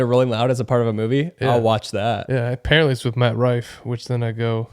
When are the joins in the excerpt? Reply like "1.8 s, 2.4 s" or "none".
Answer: 2.2 s

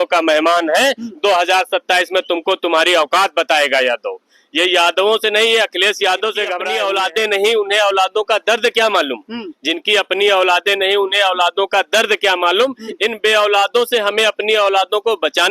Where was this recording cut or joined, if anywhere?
6.6 s

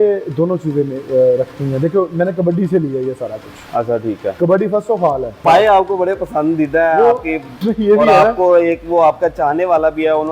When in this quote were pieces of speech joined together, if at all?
5.4 s

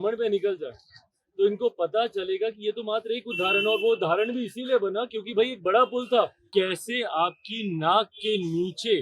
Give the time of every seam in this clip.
6.4 s

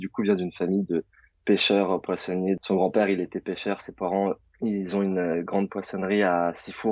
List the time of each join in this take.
2.6 s, 4.5 s

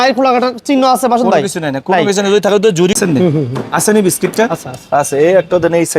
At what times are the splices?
3.0 s

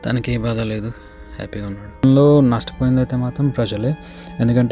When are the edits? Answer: 2.0 s

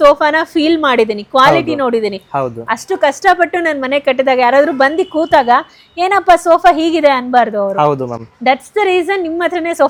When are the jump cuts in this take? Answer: none

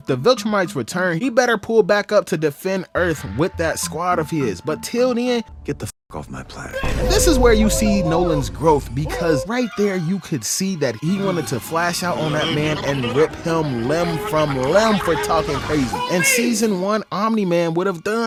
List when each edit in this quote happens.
none

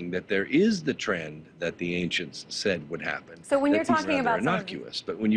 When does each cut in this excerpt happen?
4.4 s

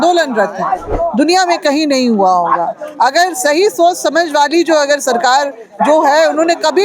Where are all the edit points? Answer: 0.9 s

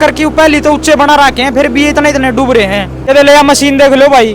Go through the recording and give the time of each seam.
3.0 s

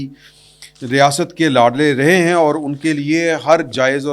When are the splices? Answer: none

